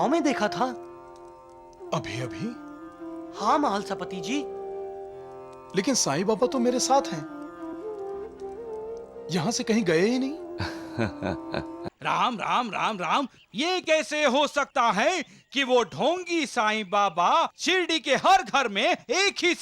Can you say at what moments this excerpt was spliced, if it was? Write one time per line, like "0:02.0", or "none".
0:11.9